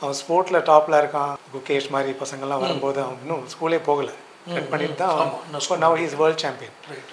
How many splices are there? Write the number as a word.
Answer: one